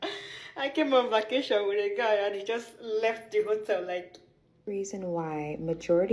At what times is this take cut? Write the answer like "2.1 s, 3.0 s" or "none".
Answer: 4.6 s